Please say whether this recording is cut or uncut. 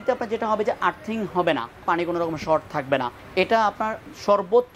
cut